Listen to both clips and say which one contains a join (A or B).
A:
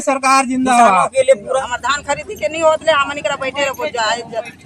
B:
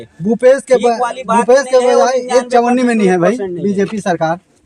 A